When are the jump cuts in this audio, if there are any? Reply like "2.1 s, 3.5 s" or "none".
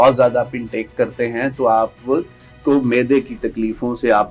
none